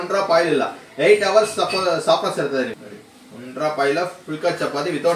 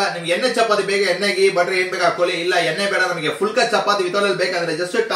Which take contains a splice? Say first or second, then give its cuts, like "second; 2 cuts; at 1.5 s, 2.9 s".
first; 1 cut; at 2.7 s